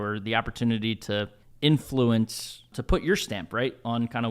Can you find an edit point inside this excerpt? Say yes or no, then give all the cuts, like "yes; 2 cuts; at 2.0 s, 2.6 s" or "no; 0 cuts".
yes; 2 cuts; at 1.4 s, 2.8 s